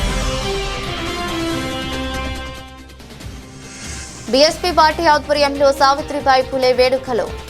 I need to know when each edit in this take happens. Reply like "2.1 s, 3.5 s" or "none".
3.2 s, 3.9 s